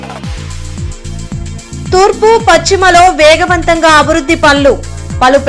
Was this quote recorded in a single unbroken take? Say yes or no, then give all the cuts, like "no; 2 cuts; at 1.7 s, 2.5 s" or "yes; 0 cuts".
no; 1 cut; at 1.9 s